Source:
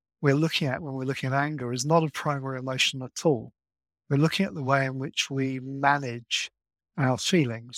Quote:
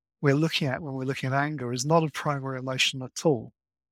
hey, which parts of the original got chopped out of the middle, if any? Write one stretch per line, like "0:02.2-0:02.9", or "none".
none